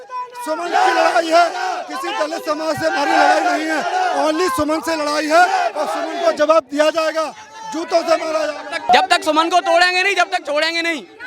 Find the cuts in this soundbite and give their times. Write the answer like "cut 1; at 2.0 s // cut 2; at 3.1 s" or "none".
cut 1; at 8.9 s

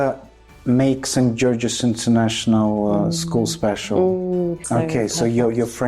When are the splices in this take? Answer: cut 1; at 4.6 s

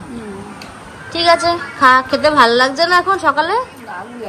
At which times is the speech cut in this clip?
none

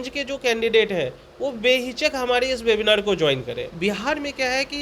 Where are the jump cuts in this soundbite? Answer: cut 1; at 3.7 s

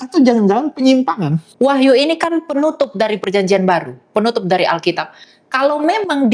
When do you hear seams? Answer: cut 1; at 1.4 s

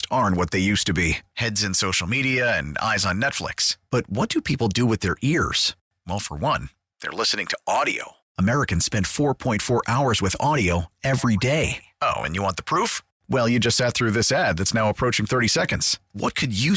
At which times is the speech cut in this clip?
none

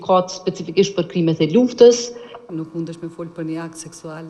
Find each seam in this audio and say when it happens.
cut 1; at 2.5 s

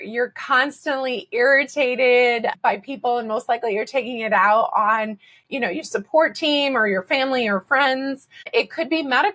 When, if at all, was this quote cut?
cut 1; at 2.6 s // cut 2; at 8.4 s

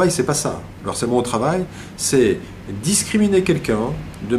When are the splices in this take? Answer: cut 1; at 3.0 s

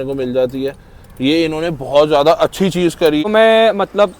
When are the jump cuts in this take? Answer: cut 1; at 3.2 s

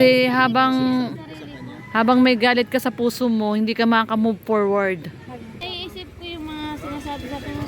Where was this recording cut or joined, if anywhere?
cut 1; at 5.2 s

